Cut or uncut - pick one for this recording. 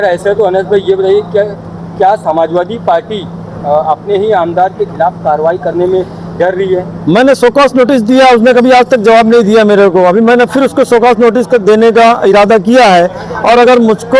uncut